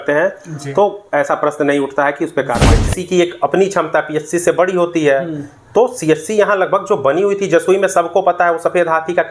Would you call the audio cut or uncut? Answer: cut